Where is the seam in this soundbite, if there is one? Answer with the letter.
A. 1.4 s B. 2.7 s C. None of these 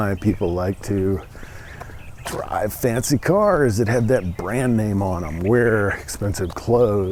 C